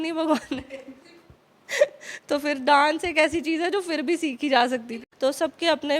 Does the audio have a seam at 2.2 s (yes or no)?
no